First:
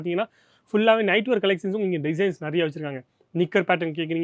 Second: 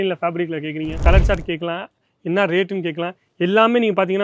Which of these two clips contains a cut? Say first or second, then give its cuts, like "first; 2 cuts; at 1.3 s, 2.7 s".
second; 1 cut; at 1.0 s